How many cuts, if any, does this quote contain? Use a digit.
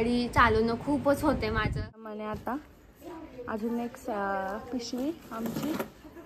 1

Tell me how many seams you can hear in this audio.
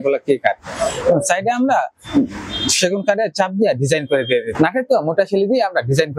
1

